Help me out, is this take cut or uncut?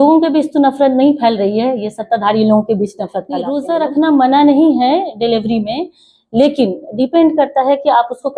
cut